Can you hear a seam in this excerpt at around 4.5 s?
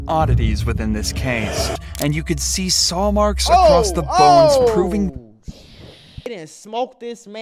no; 2 cuts; at 1.8 s, 6.3 s

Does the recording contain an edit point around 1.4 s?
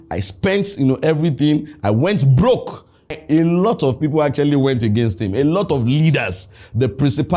no; 1 cut; at 3.1 s

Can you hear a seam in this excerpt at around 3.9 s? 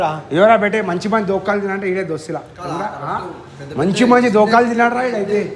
no; 0 cuts

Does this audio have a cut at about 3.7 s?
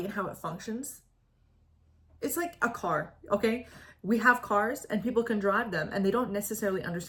no; 0 cuts

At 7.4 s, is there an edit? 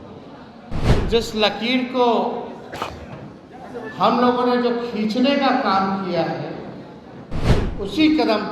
yes; 1 cut; at 7.4 s

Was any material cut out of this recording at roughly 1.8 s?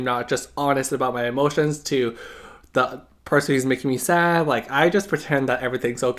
no; 0 cuts

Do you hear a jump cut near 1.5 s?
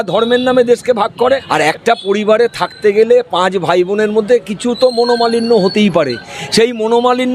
yes; 1 cut; at 1.5 s

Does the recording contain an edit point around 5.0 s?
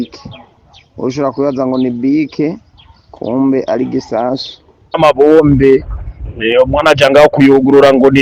yes; 1 cut; at 5.0 s

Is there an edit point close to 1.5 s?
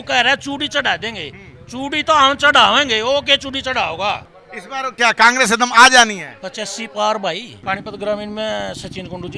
no; 2 cuts; at 4.3 s, 7.6 s

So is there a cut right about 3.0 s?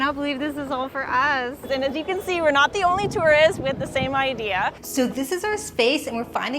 no; 2 cuts; at 1.7 s, 4.8 s

